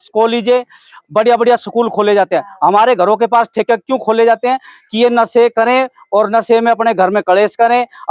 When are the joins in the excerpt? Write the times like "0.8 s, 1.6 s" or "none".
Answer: none